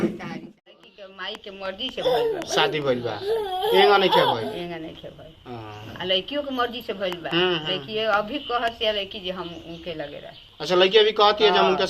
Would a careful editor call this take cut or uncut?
cut